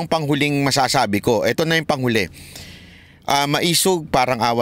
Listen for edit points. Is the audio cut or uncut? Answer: uncut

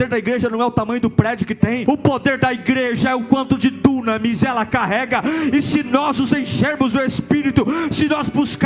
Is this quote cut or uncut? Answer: cut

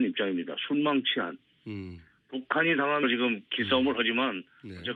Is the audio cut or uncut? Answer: uncut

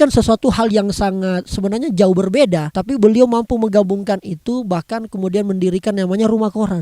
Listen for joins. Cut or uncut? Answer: cut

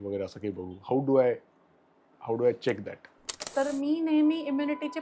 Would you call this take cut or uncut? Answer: cut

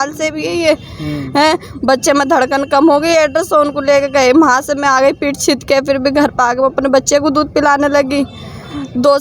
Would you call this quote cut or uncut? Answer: uncut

